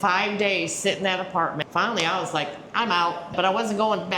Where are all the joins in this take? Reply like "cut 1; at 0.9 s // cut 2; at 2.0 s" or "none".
cut 1; at 1.6 s // cut 2; at 3.3 s